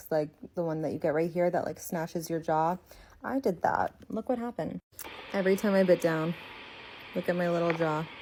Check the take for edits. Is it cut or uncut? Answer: uncut